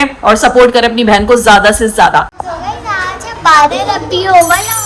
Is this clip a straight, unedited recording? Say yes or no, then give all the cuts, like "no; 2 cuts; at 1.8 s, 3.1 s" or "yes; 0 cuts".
no; 1 cut; at 2.4 s